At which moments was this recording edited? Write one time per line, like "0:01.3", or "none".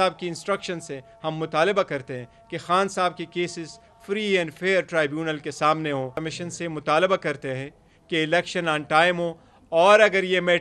0:06.2

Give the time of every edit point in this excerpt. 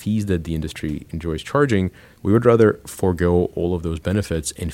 0:02.0

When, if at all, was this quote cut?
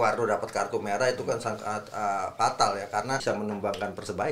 0:03.2

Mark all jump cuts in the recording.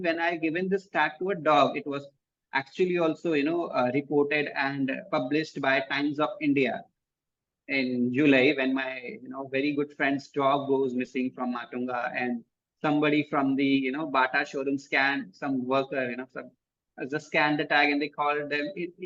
none

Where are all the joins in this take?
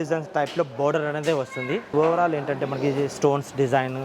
0:01.9

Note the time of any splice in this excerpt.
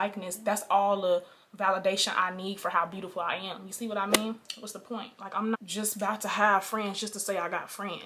0:04.4

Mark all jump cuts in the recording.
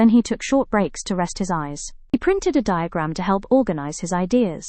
0:02.1

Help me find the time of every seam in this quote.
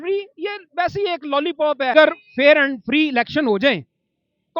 0:01.9

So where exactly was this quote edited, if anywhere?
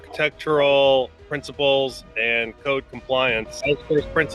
none

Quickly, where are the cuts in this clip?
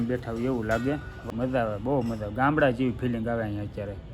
0:01.1

